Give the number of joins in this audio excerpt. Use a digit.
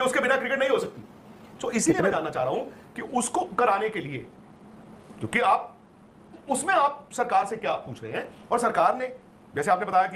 0